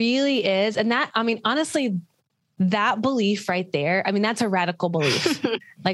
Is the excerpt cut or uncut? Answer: uncut